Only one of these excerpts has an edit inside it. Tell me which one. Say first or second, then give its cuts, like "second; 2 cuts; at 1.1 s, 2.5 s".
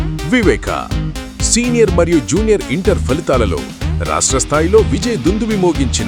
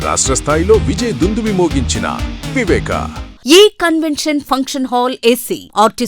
second; 1 cut; at 3.3 s